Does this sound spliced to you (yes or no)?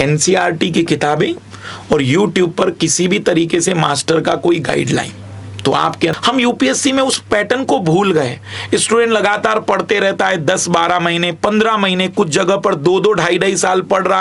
yes